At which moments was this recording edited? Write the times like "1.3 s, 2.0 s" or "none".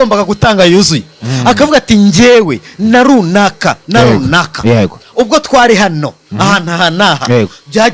none